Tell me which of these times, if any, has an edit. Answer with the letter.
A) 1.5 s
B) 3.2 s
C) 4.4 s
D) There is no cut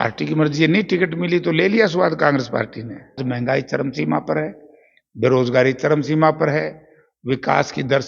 B